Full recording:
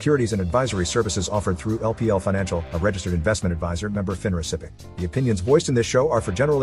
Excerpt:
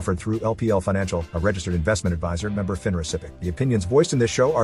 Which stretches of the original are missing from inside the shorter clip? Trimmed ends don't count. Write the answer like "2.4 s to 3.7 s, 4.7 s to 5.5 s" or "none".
4.8 s to 4.9 s